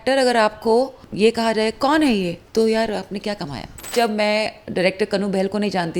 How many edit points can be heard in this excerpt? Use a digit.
3